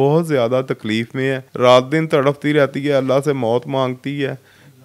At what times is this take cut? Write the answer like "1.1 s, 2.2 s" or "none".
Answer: none

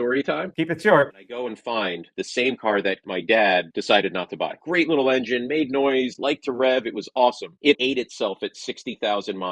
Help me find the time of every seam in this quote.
2.1 s, 4.6 s, 7.8 s

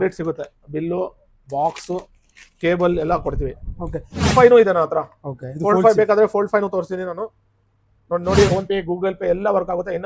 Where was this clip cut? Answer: 4.3 s, 8.5 s

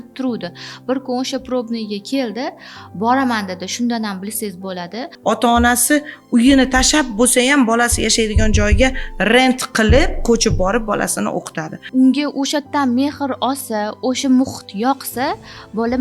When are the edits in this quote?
5.1 s, 11.7 s

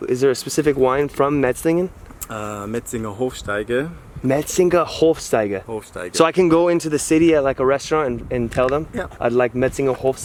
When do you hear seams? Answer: none

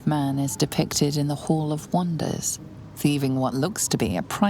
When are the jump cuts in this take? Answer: 3.5 s

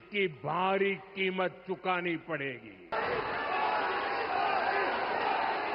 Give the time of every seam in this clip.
2.9 s

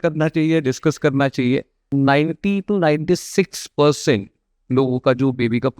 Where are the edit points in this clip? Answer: 1.8 s

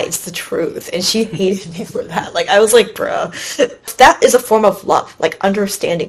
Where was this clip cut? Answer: 3.9 s

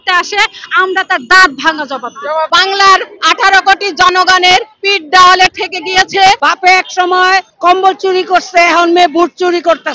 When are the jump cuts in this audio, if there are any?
2.5 s, 6.4 s

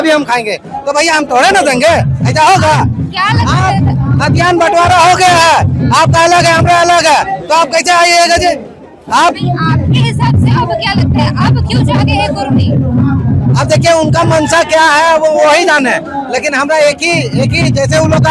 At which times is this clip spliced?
none

